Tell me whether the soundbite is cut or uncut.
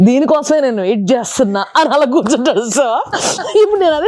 uncut